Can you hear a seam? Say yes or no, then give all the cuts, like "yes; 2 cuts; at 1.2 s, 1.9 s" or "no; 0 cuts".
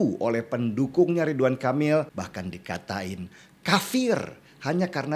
yes; 1 cut; at 2.1 s